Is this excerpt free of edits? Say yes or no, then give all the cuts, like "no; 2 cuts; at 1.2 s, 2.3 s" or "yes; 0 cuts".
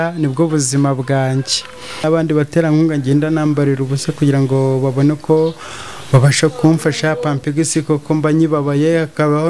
no; 1 cut; at 2.0 s